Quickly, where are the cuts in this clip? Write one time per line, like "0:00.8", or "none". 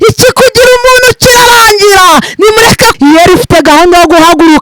0:02.9